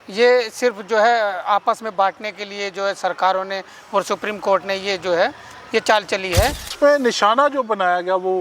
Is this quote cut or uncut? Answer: cut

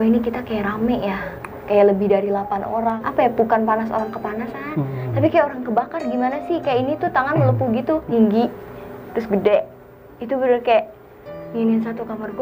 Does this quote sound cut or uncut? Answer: cut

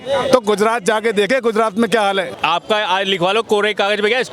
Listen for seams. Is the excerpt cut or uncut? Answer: cut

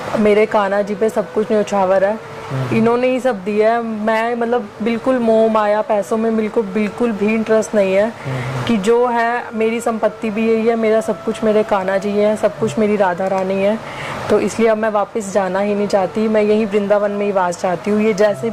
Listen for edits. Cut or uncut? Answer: uncut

